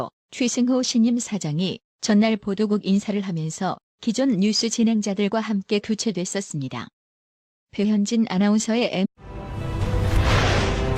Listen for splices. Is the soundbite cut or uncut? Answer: uncut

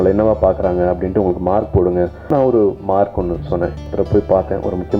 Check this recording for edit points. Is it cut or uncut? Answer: cut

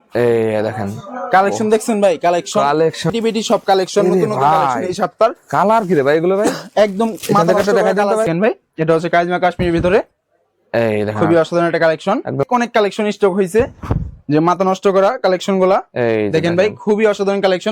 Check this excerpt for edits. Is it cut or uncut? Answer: cut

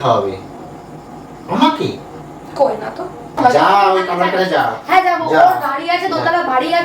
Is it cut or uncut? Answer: cut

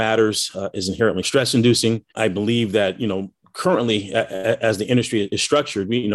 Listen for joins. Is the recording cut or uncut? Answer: cut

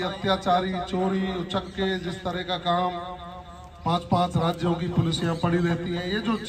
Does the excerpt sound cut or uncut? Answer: uncut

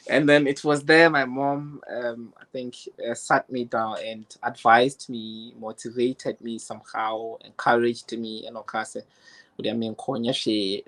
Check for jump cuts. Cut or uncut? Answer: uncut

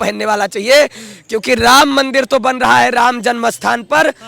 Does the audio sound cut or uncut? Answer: uncut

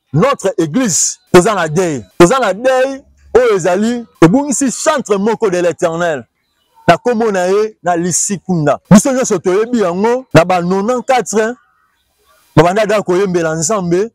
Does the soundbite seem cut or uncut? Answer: cut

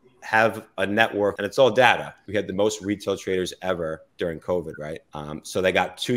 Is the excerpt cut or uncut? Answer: cut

